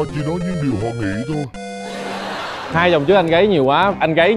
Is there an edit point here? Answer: yes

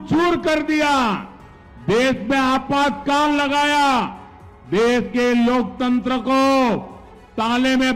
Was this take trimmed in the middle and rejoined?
no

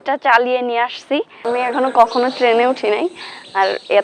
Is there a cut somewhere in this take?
yes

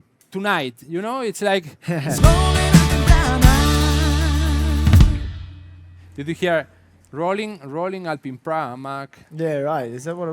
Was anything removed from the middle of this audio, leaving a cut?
yes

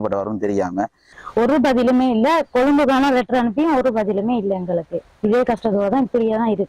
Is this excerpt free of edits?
no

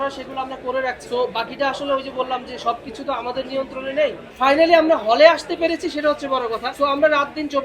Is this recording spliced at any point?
yes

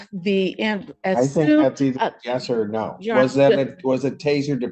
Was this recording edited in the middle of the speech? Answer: no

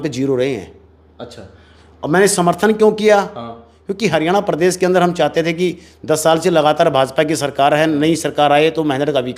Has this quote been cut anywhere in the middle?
no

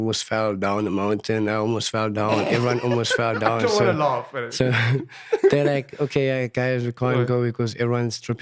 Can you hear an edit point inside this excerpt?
no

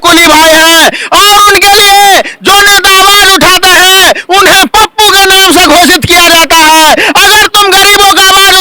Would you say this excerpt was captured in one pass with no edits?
yes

